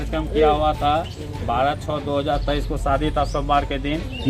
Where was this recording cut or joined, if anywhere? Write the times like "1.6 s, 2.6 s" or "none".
none

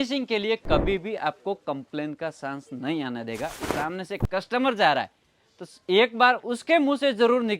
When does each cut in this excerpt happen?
3.7 s

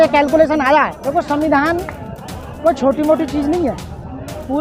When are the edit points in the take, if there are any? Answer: 1.0 s

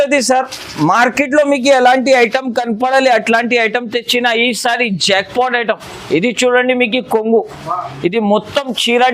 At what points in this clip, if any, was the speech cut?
none

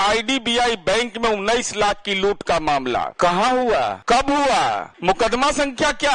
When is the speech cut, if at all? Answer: 3.1 s, 4.0 s, 4.9 s

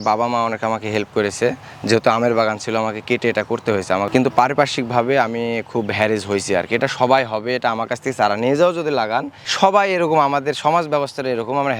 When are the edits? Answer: none

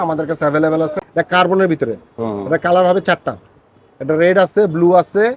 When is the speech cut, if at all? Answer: 1.0 s

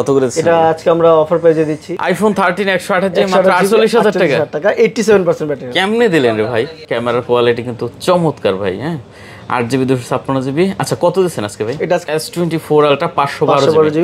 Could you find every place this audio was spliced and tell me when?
1.9 s, 6.9 s, 12.0 s

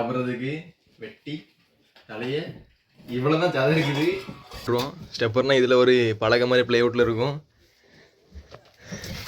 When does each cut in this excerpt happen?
4.7 s

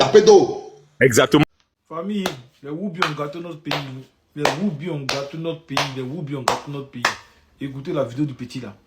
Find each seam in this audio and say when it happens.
1.4 s

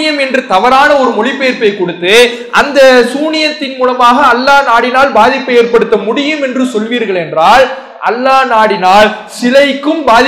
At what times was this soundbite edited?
none

